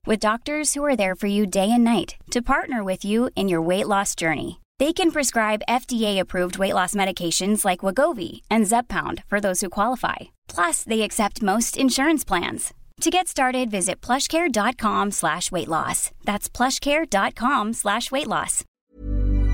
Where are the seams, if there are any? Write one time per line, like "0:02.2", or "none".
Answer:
0:18.6